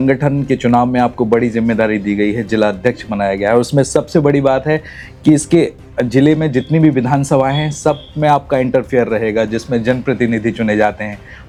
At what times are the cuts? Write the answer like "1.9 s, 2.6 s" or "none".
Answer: none

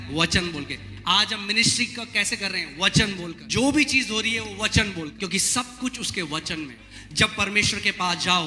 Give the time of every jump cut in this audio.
3.4 s, 5.1 s, 6.8 s

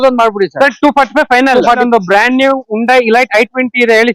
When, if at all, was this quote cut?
1.8 s

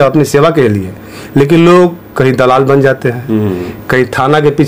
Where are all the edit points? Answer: none

